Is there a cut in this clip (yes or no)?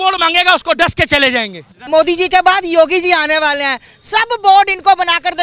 yes